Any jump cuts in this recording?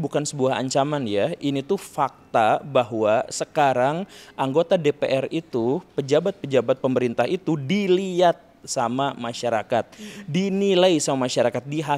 no; 0 cuts

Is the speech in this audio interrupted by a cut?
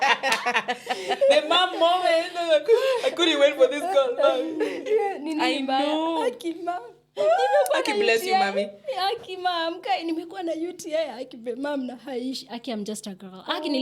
no; 0 cuts

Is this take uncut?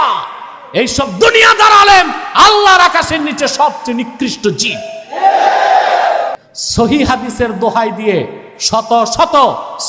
no; 1 cut; at 6.4 s

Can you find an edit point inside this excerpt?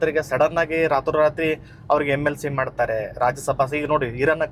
no; 0 cuts

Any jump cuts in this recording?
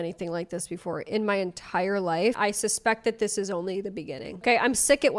no; 0 cuts

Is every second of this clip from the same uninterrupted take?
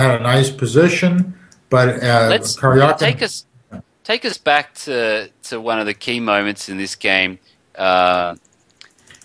no; 1 cut; at 3.3 s

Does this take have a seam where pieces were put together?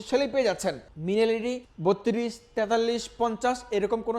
yes; 2 cuts; at 0.9 s, 1.7 s

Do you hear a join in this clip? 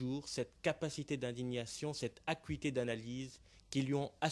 yes; 1 cut; at 2.0 s

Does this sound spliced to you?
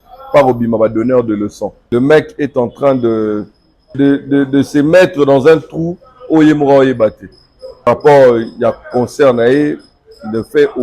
yes; 3 cuts; at 1.7 s, 3.9 s, 7.9 s

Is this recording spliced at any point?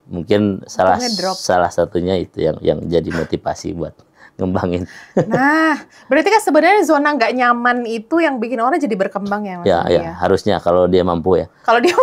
no; 0 cuts

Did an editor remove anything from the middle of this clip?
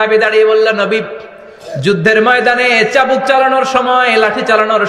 no; 0 cuts

